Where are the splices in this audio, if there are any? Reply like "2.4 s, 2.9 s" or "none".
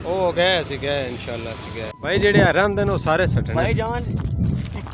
1.9 s